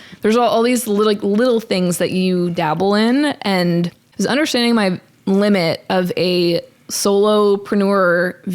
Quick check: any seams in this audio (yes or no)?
yes